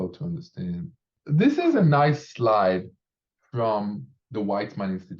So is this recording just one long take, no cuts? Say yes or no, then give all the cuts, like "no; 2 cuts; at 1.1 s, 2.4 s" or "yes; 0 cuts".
no; 1 cut; at 4.1 s